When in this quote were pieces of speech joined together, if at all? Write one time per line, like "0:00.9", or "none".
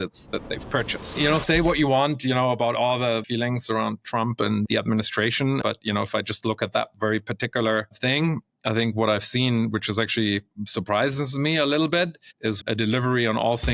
0:01.2
0:03.3
0:04.7
0:05.6
0:12.6